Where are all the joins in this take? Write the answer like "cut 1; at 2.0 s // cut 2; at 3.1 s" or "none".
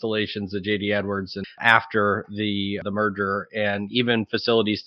cut 1; at 1.6 s // cut 2; at 2.8 s